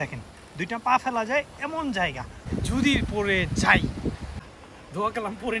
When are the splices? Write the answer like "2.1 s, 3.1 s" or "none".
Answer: 2.5 s, 4.4 s